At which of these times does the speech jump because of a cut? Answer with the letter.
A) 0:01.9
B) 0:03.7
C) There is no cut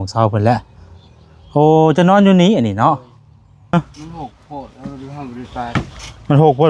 B